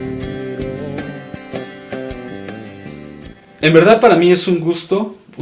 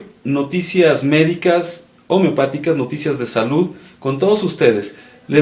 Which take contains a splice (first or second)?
first